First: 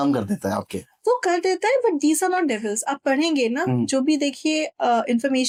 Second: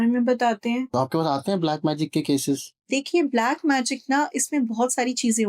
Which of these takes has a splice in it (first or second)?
second